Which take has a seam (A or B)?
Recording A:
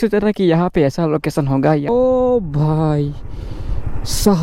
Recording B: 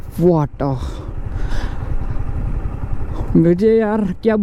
A